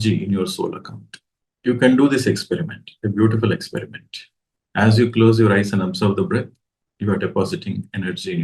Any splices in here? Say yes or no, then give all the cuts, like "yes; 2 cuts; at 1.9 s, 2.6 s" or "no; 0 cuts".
no; 0 cuts